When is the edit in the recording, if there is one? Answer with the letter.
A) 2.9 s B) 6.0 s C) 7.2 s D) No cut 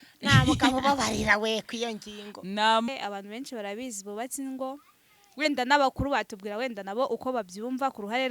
A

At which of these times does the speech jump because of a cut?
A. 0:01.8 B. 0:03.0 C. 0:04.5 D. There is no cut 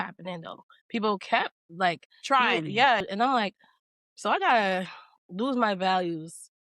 B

